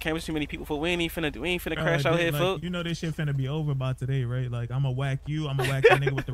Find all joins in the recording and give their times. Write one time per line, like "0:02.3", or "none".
none

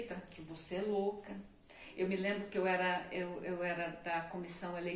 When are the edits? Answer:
none

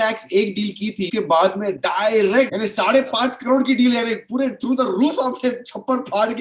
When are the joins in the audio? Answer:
0:01.1
0:02.5

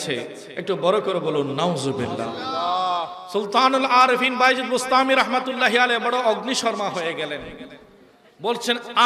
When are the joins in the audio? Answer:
0:03.2

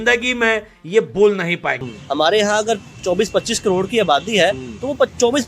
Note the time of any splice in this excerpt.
0:01.8

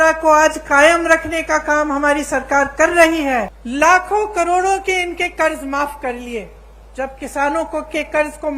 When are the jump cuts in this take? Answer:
0:03.6

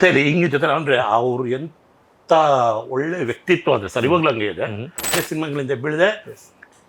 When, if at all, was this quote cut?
0:05.2

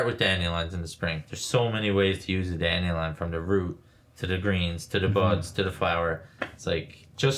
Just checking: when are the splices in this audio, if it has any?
0:01.3

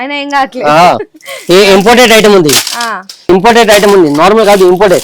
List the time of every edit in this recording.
0:03.2

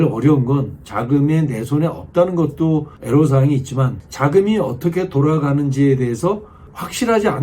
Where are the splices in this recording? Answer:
0:02.9
0:04.0

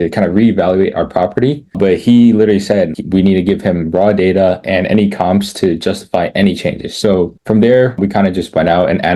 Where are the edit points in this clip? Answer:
none

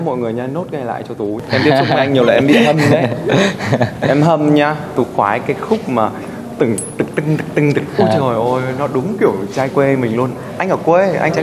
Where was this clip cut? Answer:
0:01.4
0:04.9

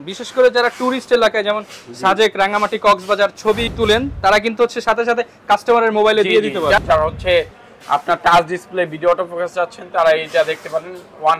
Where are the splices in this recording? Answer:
0:03.7
0:06.8

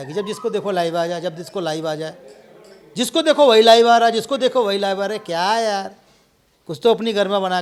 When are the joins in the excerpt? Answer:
none

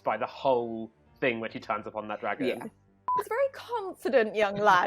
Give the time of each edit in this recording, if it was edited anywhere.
0:03.1

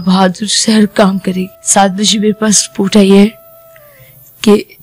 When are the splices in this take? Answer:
0:01.6

